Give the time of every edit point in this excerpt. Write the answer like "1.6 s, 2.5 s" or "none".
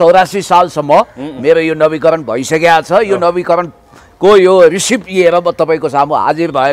none